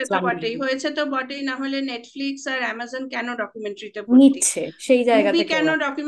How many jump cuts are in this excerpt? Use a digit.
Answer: 0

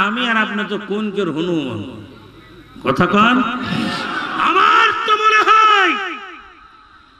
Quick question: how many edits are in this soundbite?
1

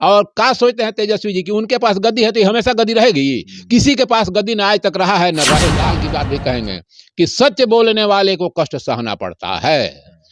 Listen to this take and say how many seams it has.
1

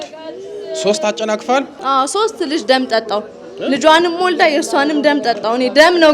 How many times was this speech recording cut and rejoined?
1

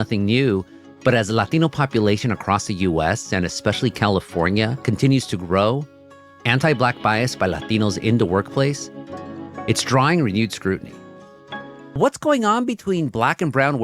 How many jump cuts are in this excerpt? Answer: 1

